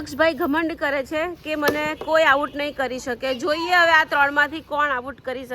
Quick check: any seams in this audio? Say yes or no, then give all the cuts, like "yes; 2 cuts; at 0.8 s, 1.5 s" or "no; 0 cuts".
no; 0 cuts